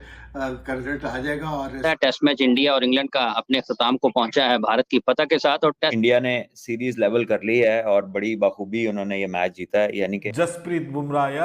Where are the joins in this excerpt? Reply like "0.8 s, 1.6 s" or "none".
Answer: 1.8 s, 5.9 s, 10.2 s